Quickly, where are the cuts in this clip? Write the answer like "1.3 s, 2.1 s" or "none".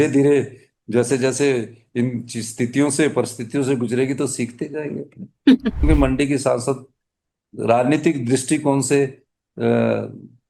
5.8 s